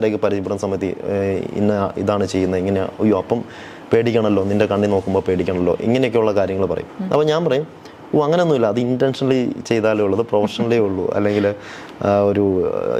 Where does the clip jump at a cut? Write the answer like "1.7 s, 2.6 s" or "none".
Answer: none